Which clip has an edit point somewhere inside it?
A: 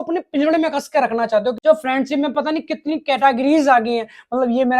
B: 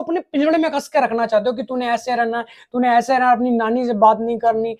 A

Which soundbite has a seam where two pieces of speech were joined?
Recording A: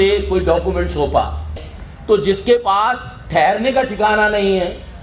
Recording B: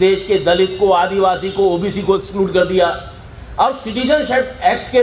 A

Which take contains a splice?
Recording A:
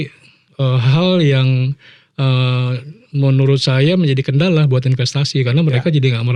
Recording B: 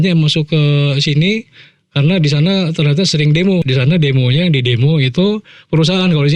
B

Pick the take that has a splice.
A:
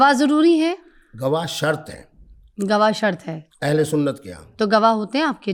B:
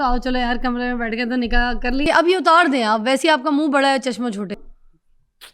B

